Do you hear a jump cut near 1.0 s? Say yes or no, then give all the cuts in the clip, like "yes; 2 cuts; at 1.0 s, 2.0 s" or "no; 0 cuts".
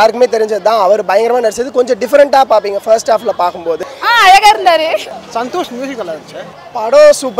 no; 2 cuts; at 3.8 s, 5.1 s